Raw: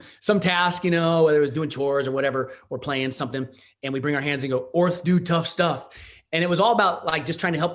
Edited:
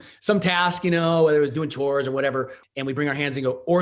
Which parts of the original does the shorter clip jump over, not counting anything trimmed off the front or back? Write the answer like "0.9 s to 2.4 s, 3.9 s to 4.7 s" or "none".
2.6 s to 3.7 s